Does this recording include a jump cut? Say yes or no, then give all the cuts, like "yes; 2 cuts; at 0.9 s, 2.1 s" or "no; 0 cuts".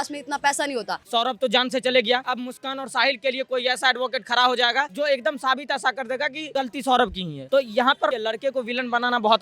yes; 6 cuts; at 1.0 s, 2.3 s, 4.9 s, 6.5 s, 7.3 s, 8.1 s